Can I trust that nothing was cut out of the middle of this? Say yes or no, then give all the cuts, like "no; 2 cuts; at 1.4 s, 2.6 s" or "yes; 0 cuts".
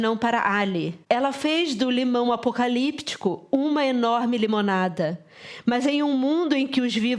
no; 1 cut; at 0.9 s